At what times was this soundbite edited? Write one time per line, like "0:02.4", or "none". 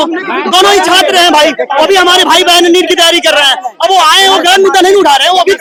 none